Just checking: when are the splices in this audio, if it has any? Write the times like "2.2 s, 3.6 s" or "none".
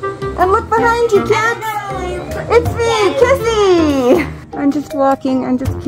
4.5 s